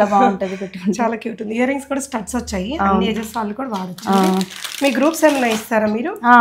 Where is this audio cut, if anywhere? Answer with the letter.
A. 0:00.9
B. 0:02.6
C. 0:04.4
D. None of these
D